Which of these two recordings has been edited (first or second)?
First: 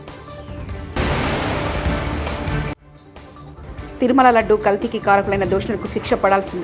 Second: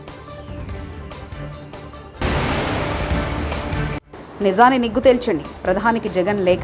first